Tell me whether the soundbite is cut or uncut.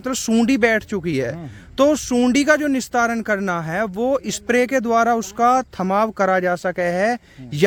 uncut